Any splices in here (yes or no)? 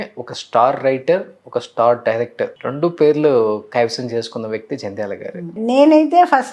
yes